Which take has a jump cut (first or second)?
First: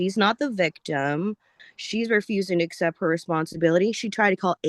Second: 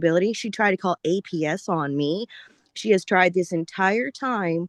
first